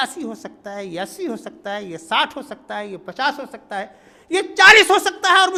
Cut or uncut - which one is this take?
uncut